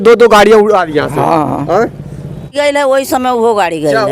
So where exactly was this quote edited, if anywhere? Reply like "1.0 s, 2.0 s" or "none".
2.5 s